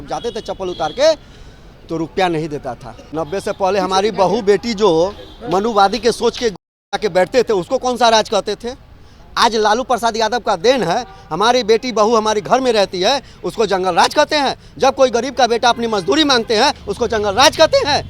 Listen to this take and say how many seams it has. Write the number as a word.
one